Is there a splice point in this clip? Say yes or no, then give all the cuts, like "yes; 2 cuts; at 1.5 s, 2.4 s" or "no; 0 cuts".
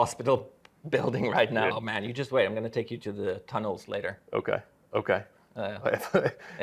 yes; 1 cut; at 1.7 s